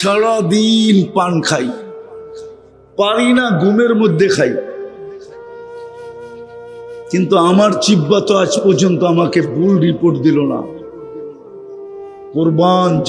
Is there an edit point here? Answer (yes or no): yes